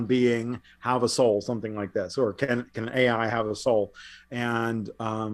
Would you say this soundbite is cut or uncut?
uncut